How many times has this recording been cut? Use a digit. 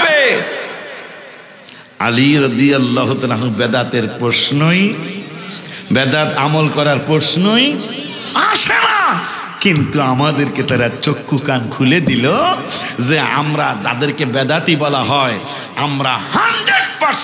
0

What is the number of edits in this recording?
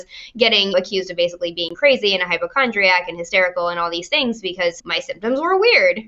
1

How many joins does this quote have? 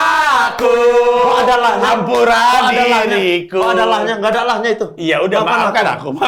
0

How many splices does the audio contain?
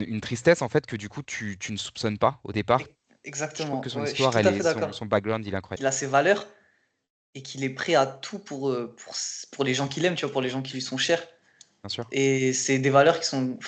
1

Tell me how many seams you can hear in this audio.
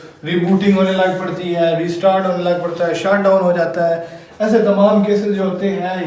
0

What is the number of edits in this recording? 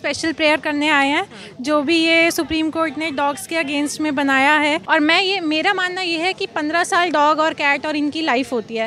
1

